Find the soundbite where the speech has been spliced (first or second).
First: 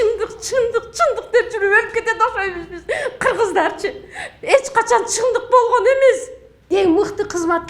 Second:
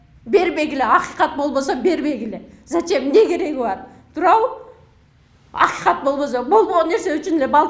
first